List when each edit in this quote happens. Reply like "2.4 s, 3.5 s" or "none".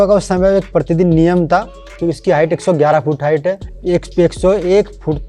1.9 s, 3.7 s